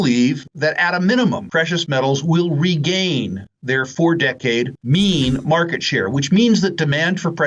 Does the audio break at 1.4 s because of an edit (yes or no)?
yes